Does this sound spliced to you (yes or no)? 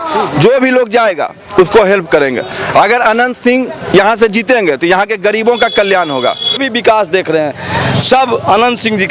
yes